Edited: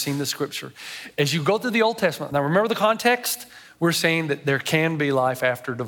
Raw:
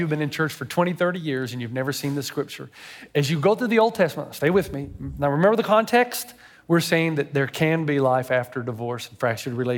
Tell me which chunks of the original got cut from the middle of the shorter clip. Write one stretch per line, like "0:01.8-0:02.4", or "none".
0:04.2-0:05.1